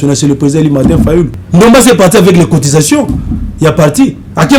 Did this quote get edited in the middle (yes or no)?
yes